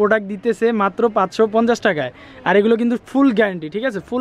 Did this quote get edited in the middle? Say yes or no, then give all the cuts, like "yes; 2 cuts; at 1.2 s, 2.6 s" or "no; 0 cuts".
no; 0 cuts